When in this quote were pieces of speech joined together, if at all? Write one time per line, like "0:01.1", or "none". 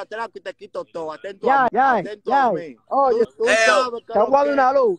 0:01.7
0:03.3